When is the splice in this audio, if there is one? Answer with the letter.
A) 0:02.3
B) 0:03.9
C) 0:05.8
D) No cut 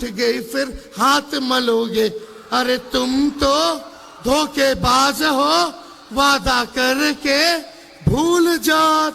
D